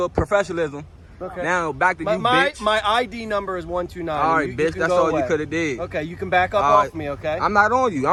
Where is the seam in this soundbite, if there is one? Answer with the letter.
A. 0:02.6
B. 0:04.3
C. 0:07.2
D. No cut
D